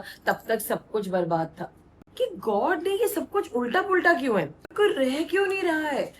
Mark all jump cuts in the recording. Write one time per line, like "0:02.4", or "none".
0:02.0
0:04.7